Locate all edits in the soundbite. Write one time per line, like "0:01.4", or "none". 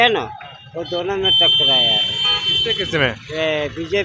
none